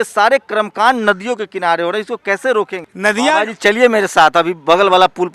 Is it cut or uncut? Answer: cut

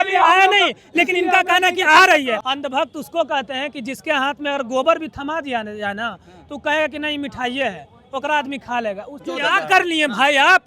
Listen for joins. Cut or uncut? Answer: cut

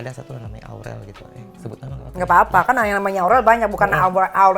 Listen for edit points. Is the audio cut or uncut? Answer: uncut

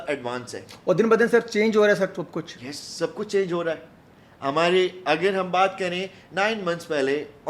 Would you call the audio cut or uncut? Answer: uncut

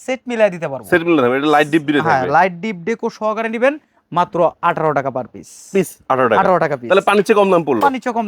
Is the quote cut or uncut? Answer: uncut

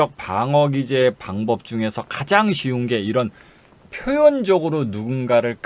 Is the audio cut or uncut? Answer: uncut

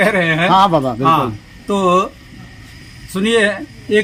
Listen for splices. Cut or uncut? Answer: uncut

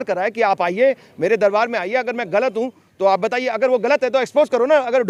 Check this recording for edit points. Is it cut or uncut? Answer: uncut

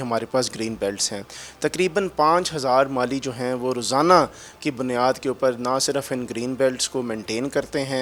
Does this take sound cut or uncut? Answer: uncut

